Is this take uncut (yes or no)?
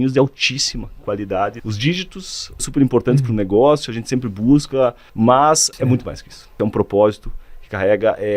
no